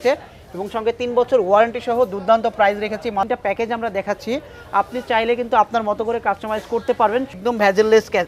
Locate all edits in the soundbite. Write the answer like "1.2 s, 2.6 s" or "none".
3.3 s, 7.4 s